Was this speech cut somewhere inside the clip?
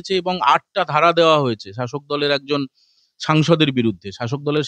no; 0 cuts

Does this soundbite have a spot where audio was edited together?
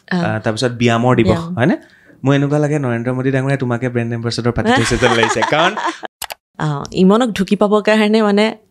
yes; 1 cut; at 6.0 s

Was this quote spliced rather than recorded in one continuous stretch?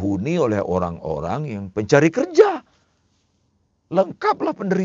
no; 0 cuts

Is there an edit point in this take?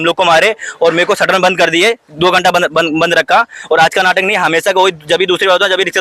no; 0 cuts

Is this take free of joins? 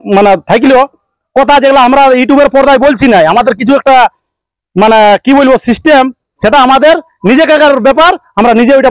yes; 0 cuts

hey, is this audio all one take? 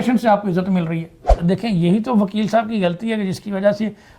no; 1 cut; at 1.3 s

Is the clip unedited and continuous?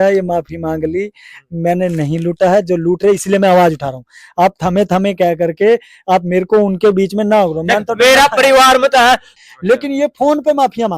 no; 1 cut; at 9.3 s

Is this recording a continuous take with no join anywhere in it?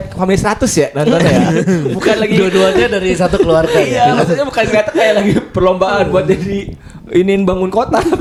yes; 0 cuts

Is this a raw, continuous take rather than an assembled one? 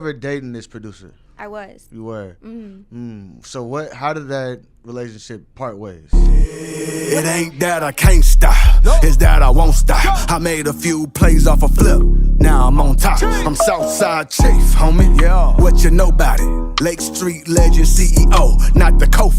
no; 1 cut; at 6.0 s

